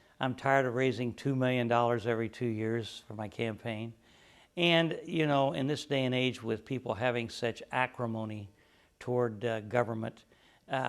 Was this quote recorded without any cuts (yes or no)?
no